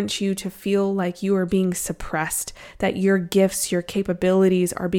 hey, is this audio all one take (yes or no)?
yes